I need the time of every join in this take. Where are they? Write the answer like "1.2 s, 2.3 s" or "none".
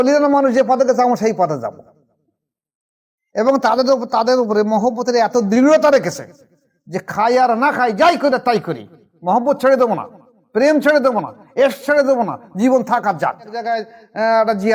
13.7 s